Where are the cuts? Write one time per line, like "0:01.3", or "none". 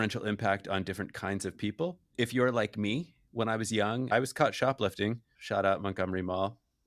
0:02.1
0:04.1